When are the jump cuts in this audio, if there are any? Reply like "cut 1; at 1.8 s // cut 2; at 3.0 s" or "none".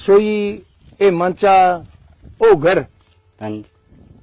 none